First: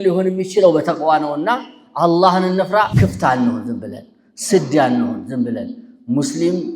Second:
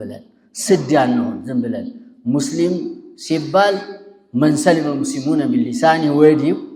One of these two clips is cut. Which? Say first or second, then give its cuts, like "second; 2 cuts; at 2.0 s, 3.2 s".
first; 1 cut; at 2.9 s